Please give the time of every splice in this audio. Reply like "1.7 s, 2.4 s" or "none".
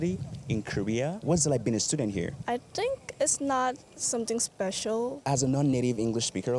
5.2 s